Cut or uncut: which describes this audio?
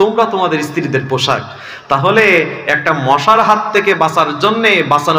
uncut